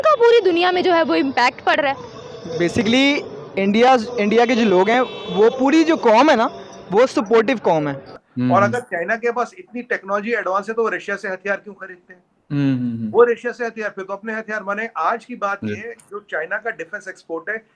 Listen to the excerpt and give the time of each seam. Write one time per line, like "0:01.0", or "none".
0:08.1